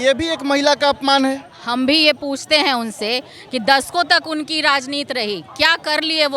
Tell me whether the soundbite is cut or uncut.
uncut